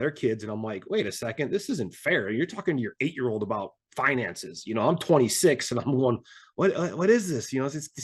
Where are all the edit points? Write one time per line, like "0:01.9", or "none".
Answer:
none